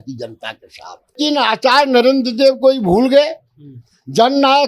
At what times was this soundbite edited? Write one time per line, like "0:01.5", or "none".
0:01.2